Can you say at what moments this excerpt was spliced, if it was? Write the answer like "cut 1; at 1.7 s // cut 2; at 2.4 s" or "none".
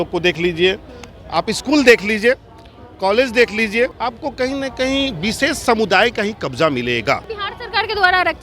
cut 1; at 4.1 s // cut 2; at 7.3 s